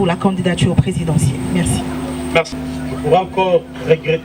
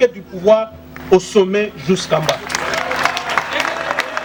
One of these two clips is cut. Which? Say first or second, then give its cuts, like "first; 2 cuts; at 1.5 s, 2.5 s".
first; 1 cut; at 2.5 s